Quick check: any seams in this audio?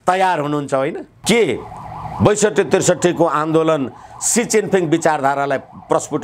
yes; 1 cut; at 1.1 s

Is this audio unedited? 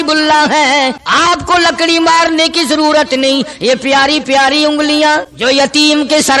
no; 2 cuts; at 1.0 s, 5.3 s

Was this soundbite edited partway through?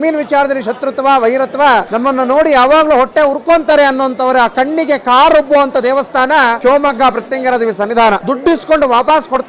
yes; 3 cuts; at 1.9 s, 6.6 s, 8.2 s

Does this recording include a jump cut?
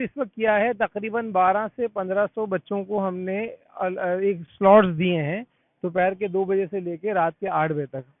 no; 0 cuts

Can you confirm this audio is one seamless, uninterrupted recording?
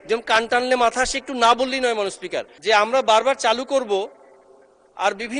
no; 1 cut; at 2.5 s

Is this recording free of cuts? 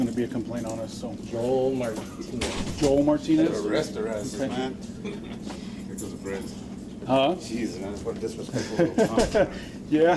yes; 0 cuts

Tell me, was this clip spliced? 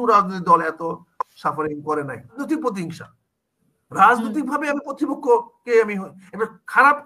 yes; 1 cut; at 2.4 s

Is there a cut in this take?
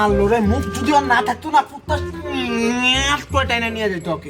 yes; 1 cut; at 3.4 s

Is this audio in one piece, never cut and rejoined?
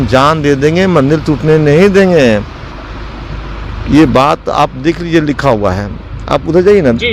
yes; 0 cuts

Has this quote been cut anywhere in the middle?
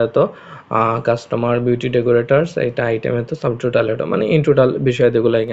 no; 0 cuts

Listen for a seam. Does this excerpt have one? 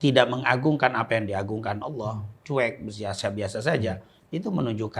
no; 0 cuts

